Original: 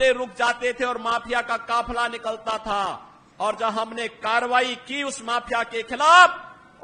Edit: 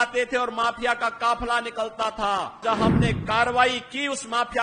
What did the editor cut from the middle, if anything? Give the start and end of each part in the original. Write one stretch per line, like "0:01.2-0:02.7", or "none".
0:03.1-0:03.6